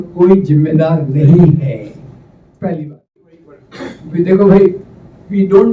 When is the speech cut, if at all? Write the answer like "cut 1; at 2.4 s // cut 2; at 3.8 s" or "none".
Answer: cut 1; at 3.4 s